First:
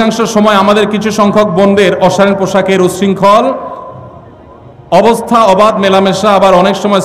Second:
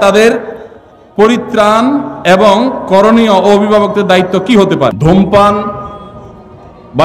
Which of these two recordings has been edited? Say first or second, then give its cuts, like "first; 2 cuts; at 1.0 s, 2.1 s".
second; 1 cut; at 5.0 s